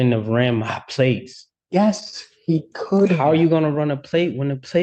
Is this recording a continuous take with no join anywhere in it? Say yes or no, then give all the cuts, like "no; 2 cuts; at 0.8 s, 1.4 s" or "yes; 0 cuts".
yes; 0 cuts